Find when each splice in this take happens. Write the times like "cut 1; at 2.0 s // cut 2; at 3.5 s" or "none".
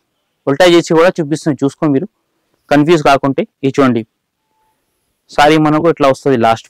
none